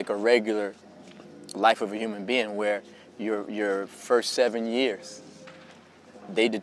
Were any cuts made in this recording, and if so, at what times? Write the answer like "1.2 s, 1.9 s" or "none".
4.7 s

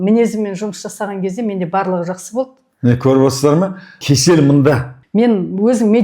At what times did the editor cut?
4.0 s, 4.9 s

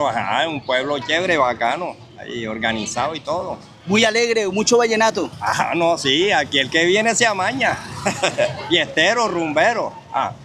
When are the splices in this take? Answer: none

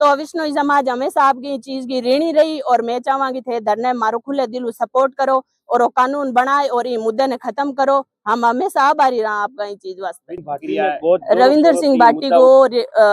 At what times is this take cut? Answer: 11.2 s

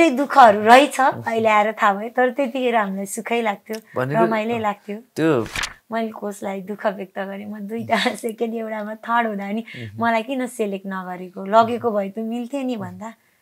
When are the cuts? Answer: 5.5 s

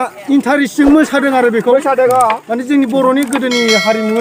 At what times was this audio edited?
none

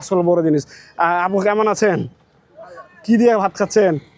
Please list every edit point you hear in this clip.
none

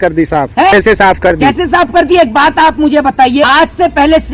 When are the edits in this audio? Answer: 0.7 s, 3.4 s

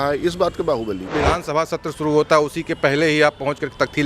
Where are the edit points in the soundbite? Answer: 1.1 s

